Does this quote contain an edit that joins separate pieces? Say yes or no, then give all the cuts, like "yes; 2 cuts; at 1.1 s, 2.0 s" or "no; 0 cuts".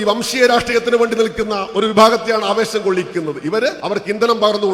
yes; 1 cut; at 3.8 s